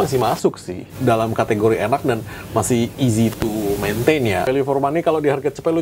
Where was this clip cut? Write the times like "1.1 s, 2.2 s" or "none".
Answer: 0.9 s, 4.4 s